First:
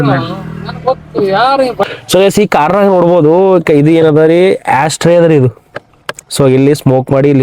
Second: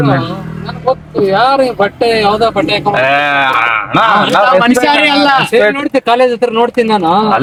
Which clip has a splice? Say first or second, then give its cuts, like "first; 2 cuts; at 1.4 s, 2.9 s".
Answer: first; 1 cut; at 1.9 s